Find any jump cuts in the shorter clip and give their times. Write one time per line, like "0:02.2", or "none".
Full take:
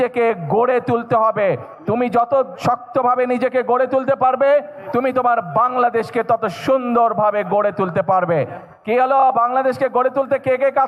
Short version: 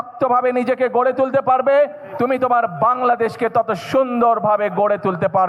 none